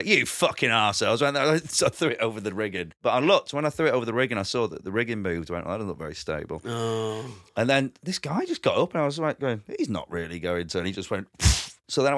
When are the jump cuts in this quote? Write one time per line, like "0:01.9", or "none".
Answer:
0:03.0

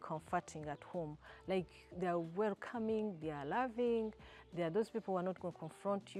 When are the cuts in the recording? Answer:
none

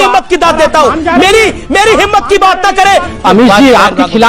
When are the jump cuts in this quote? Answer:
0:03.2

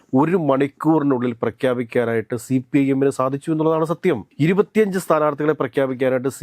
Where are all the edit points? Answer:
none

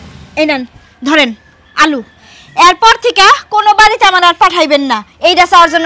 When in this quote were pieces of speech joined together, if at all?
none

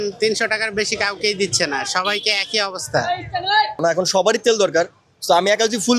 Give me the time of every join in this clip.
0:03.7

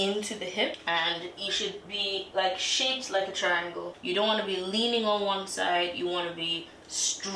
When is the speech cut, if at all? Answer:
0:00.8
0:04.0

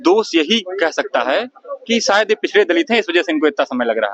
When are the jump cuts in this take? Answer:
none

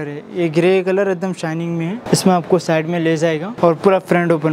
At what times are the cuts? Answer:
0:02.0
0:03.5

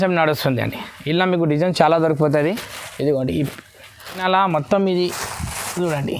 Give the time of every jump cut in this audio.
0:04.2

